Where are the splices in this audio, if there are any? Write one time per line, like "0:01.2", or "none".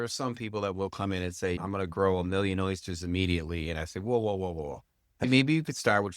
0:01.6
0:05.2